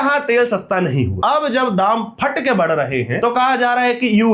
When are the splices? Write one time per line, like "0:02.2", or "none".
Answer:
0:01.2
0:03.1